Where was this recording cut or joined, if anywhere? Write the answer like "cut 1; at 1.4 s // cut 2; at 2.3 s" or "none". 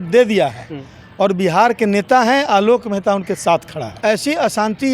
cut 1; at 3.9 s